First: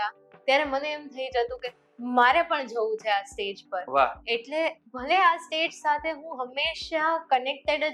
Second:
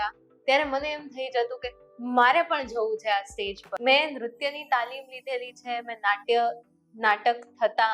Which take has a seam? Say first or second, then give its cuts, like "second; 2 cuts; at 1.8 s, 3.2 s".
second; 1 cut; at 3.6 s